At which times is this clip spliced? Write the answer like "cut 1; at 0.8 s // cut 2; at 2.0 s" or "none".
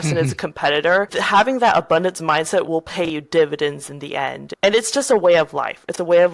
cut 1; at 4.4 s